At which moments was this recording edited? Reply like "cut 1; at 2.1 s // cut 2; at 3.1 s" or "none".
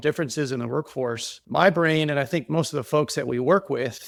none